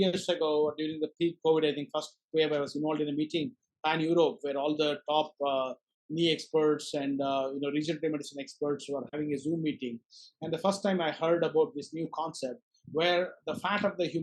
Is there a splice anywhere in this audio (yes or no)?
no